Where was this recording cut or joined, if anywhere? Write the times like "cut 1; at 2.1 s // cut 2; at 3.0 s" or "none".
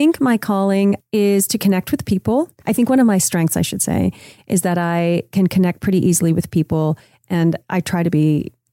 cut 1; at 1.0 s // cut 2; at 2.6 s // cut 3; at 7.6 s

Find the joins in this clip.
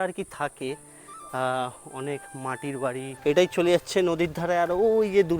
cut 1; at 3.1 s

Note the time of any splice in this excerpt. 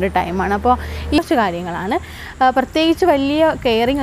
cut 1; at 1.2 s

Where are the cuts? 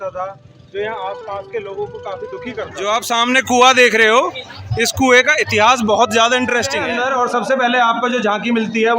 cut 1; at 2.7 s // cut 2; at 6.8 s

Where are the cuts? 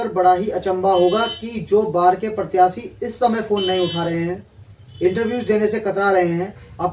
none

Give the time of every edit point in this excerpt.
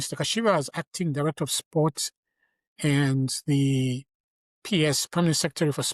none

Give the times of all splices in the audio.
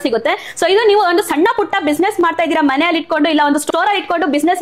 none

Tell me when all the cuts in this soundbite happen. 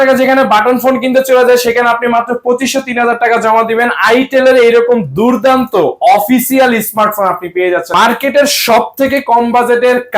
cut 1; at 7.9 s

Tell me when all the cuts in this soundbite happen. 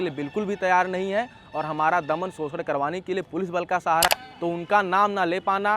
cut 1; at 4.1 s

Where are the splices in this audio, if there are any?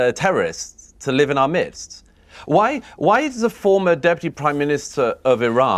cut 1; at 1.9 s

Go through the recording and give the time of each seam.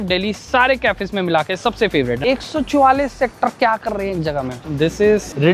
cut 1; at 2.2 s // cut 2; at 4.6 s

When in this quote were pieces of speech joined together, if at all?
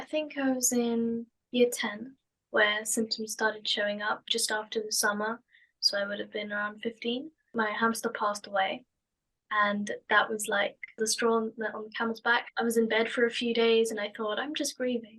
cut 1; at 1.4 s // cut 2; at 7.5 s // cut 3; at 11.0 s

